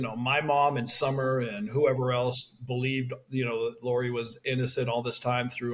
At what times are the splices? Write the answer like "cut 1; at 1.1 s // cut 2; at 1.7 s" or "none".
none